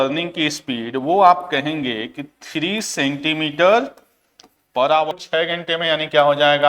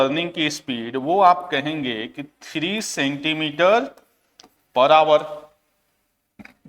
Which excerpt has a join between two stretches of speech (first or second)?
first